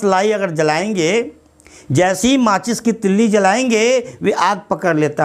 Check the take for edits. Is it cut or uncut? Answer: uncut